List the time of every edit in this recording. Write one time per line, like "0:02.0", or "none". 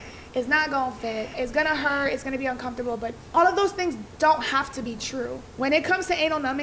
0:01.3
0:03.2
0:05.4